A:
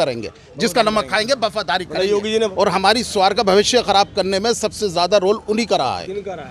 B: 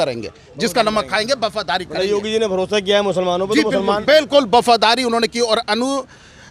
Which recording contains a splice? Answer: A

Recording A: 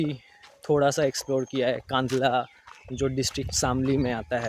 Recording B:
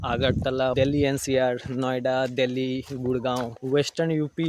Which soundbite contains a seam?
B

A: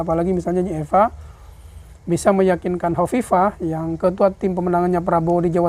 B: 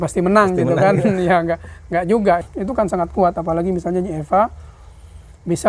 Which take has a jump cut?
B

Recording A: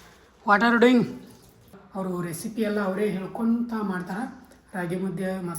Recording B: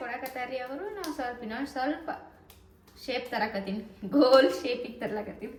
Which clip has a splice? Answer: A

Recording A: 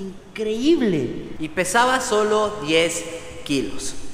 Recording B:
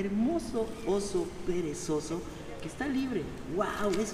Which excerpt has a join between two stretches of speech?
A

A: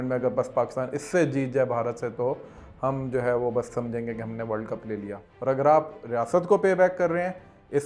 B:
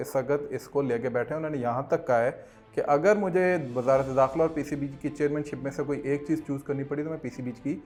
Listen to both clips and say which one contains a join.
A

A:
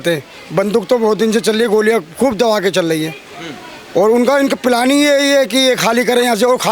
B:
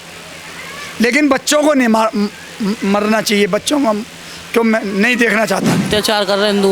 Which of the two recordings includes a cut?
B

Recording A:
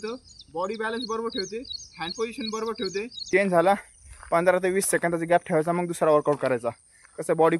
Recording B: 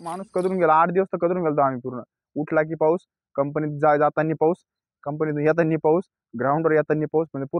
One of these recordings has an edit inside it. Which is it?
A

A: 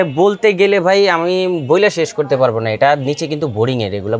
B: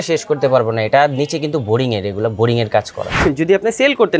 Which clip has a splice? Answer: B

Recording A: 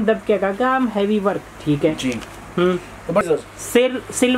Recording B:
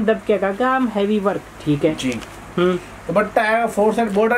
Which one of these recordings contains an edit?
A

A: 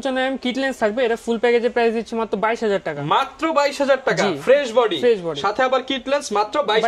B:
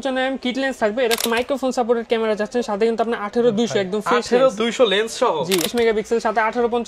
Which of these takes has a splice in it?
B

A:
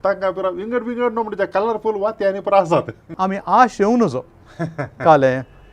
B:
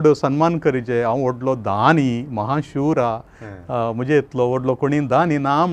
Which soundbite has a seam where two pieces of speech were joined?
A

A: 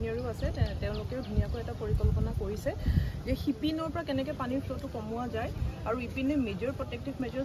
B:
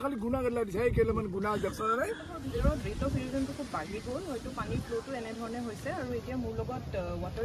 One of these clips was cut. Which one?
B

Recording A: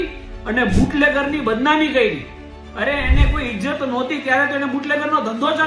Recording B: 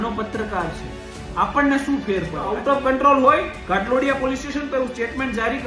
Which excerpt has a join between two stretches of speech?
B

